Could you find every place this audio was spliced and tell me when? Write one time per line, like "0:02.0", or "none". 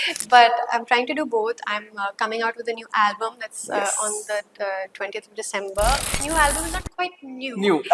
0:06.1